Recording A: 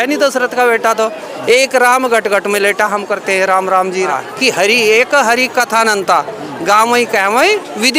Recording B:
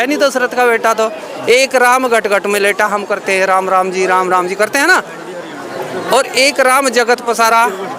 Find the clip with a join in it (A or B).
A